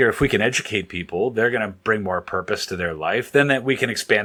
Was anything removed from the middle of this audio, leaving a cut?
no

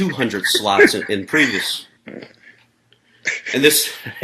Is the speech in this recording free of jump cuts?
no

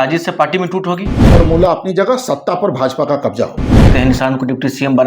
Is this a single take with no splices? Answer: no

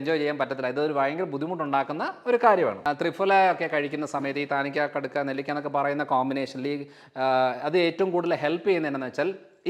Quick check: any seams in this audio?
yes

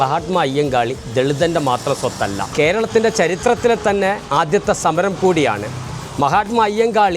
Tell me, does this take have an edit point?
yes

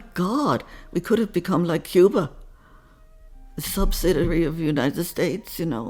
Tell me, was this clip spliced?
no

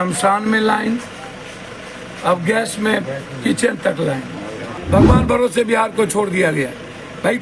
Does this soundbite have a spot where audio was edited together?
yes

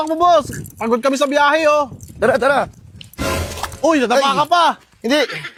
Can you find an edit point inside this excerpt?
no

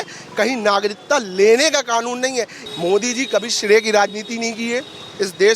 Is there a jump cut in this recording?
yes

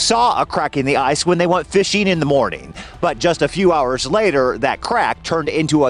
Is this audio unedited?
yes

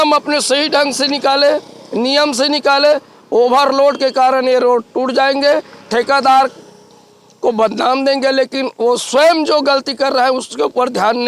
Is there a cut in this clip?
no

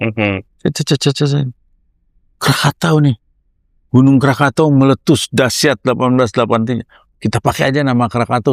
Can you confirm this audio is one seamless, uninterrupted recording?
yes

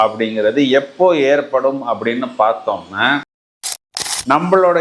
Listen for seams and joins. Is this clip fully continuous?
no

